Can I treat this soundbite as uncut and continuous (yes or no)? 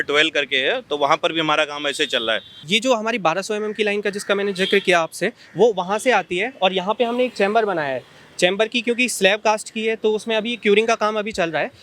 no